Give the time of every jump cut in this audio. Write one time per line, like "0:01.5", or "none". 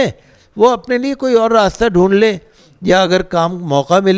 none